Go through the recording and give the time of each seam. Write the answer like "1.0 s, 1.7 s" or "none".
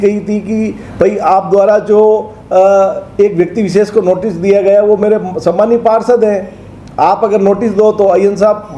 none